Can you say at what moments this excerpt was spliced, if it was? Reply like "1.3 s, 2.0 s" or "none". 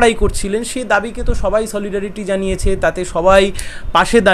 none